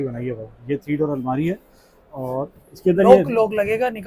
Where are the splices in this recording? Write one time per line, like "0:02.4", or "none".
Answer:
none